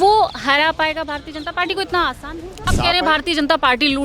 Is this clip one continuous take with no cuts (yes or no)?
no